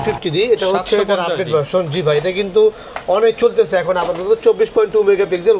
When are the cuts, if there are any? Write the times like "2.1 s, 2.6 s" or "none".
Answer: none